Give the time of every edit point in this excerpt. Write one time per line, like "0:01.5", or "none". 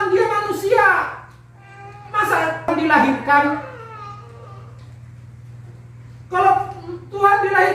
0:02.7